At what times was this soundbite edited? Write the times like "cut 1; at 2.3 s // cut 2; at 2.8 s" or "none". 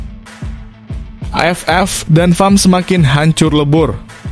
cut 1; at 1.3 s